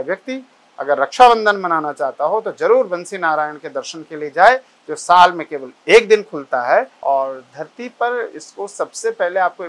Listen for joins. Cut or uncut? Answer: cut